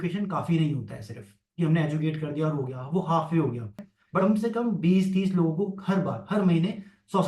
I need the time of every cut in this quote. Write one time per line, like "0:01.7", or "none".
0:04.2